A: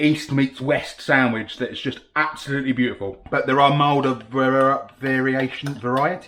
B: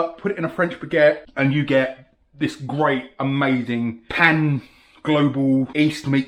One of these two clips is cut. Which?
A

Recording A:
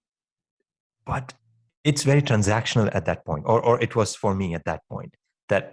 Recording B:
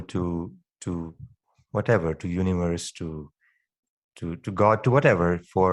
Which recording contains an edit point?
A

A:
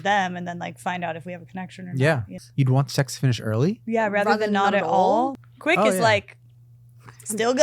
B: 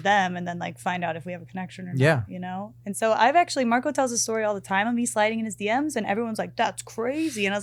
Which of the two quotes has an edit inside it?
A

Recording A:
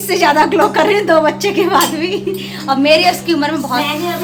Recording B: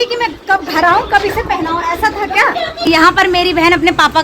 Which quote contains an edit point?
B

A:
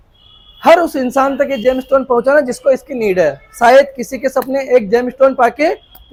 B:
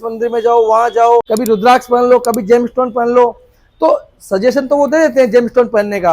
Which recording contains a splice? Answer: B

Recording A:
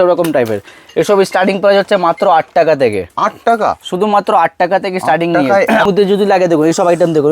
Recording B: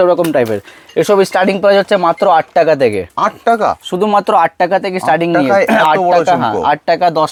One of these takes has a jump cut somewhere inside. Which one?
A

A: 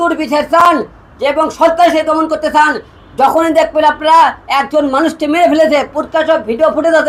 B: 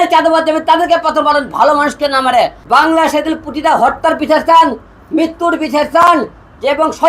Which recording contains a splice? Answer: B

